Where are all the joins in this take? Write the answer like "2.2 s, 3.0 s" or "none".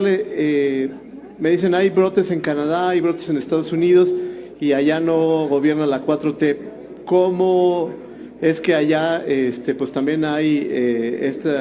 none